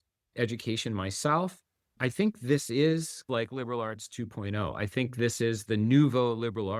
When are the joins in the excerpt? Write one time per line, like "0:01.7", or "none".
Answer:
0:05.6